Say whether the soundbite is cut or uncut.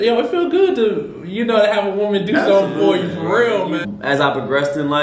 cut